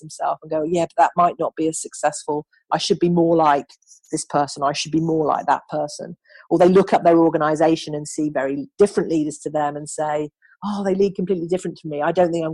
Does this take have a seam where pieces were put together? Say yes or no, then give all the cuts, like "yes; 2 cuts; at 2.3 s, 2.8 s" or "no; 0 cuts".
no; 0 cuts